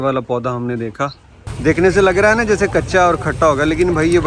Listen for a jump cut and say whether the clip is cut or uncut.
cut